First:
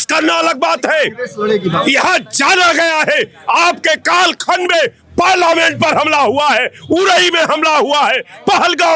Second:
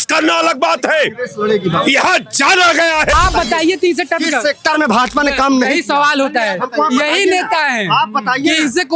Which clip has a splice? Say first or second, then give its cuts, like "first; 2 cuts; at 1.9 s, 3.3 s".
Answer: second; 1 cut; at 3.1 s